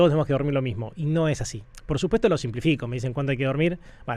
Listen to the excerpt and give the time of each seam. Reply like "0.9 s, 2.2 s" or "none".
none